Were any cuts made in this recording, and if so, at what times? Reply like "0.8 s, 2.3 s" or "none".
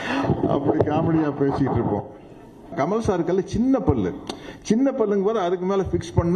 2.7 s